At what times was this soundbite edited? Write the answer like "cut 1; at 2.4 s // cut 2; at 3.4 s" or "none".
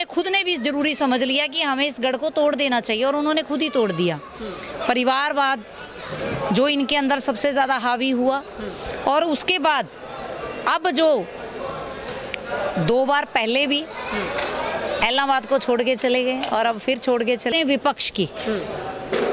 cut 1; at 17.5 s